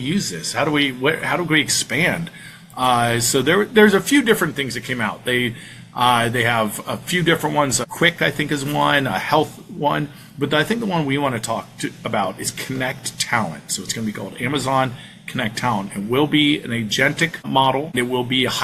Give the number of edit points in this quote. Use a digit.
0